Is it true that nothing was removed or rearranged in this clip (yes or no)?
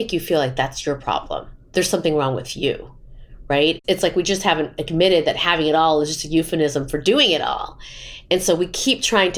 no